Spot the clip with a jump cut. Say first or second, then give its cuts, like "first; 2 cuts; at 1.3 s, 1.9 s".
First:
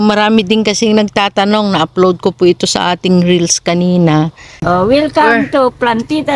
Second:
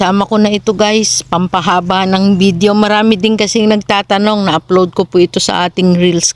first; 1 cut; at 4.6 s